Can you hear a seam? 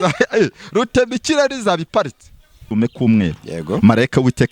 yes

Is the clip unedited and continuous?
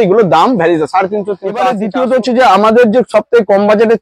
no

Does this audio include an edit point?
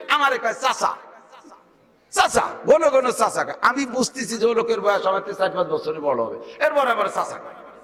no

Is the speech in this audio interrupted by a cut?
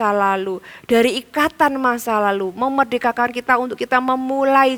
no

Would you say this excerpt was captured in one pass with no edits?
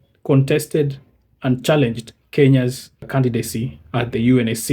no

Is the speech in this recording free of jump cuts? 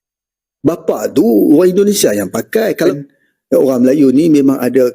no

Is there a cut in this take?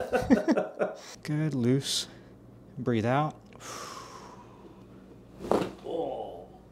yes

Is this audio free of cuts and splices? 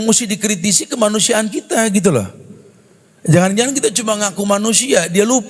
yes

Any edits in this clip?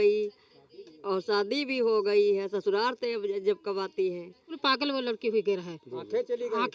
yes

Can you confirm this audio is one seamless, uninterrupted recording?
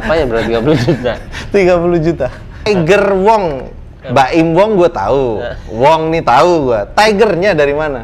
no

